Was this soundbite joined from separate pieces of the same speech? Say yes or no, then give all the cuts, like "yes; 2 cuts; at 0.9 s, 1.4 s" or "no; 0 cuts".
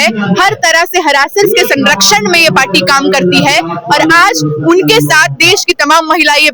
no; 0 cuts